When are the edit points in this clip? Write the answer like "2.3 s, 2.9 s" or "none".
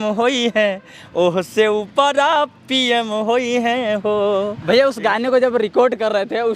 none